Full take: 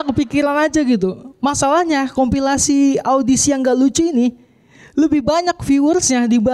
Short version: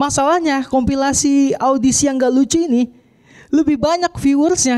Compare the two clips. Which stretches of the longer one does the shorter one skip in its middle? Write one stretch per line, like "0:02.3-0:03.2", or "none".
none